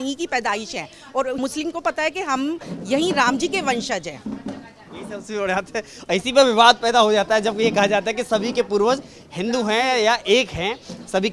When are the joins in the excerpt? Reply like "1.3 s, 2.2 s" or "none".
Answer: none